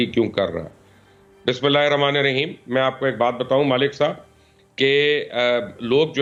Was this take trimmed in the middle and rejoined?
no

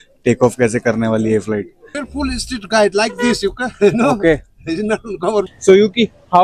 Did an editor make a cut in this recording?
yes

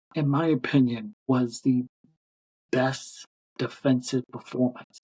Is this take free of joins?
yes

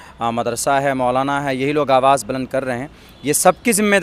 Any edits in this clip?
no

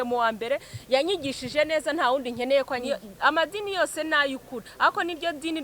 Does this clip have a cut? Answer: yes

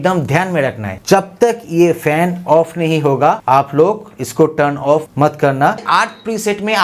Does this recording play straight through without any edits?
no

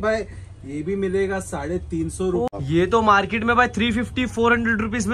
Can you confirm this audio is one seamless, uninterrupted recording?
no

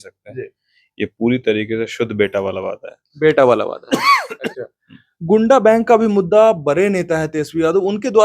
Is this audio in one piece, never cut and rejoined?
no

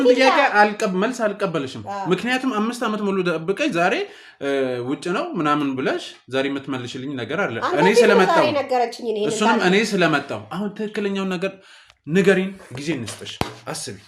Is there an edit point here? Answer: no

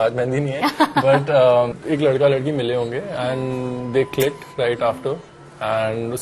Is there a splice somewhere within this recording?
yes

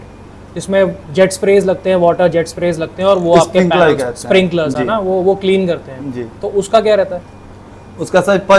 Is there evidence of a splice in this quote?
no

